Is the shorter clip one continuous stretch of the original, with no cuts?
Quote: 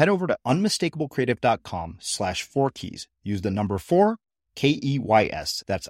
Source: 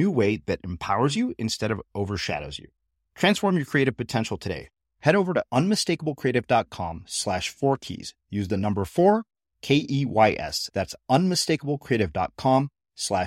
yes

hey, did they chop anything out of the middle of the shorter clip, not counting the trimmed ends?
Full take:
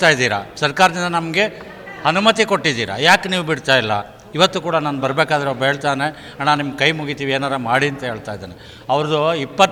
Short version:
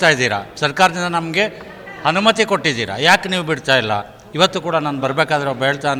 no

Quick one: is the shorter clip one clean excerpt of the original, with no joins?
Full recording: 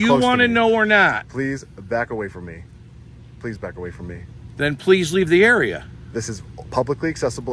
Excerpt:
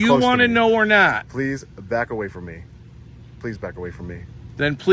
yes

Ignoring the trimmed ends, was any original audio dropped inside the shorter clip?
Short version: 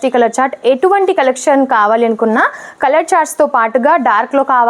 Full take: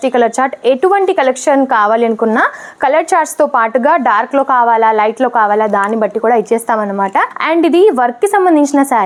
no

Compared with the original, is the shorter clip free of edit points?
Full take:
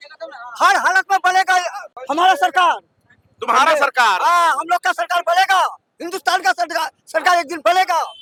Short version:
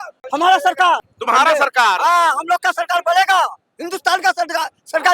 no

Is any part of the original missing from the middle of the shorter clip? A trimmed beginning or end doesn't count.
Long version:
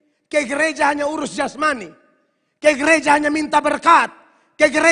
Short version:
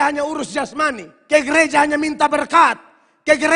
yes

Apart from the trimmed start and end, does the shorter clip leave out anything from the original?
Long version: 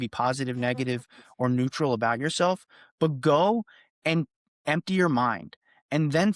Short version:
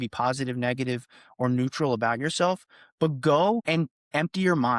yes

